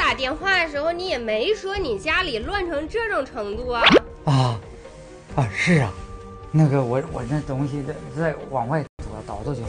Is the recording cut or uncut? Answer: uncut